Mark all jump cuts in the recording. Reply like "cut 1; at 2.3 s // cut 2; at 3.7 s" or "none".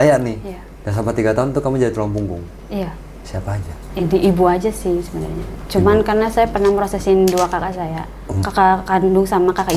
none